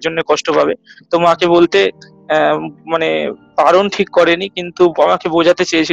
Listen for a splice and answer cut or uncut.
uncut